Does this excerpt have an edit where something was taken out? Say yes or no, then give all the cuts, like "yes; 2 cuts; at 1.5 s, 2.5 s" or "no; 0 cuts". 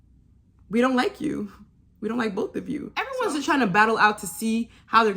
yes; 1 cut; at 3.0 s